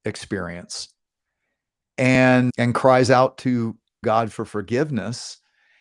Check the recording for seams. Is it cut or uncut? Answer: cut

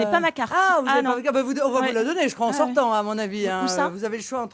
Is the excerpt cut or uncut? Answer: cut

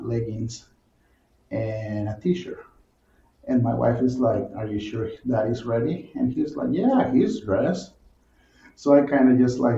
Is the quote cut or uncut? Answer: uncut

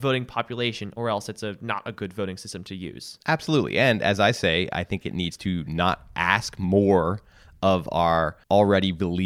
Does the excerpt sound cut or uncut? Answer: uncut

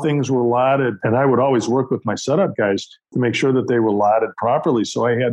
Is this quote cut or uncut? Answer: cut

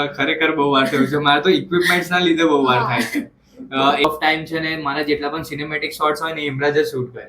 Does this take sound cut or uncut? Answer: cut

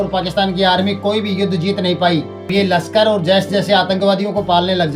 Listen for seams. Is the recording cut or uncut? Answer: cut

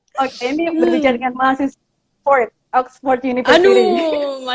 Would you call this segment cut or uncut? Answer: uncut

